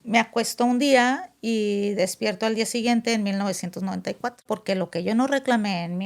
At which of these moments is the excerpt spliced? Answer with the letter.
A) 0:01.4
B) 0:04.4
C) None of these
B